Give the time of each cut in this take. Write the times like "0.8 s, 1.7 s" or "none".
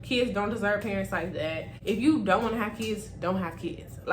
1.7 s